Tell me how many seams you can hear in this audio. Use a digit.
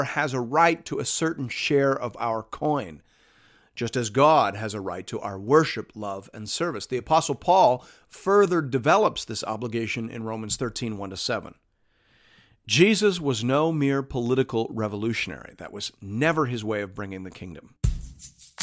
1